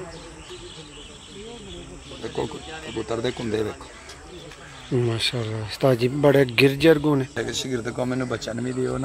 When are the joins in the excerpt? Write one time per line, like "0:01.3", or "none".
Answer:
0:07.3